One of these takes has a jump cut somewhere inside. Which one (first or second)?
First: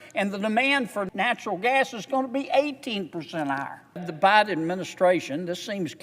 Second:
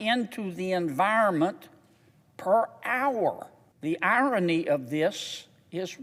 first